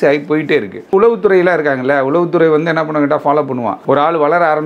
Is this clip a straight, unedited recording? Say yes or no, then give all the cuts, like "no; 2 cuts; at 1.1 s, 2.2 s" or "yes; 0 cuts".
no; 2 cuts; at 0.9 s, 3.7 s